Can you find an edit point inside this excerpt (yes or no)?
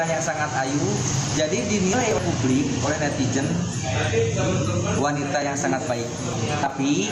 no